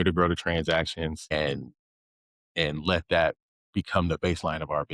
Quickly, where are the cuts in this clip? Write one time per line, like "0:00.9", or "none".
0:01.3